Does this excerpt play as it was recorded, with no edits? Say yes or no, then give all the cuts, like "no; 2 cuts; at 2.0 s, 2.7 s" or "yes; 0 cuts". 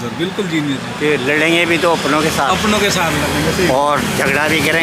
yes; 0 cuts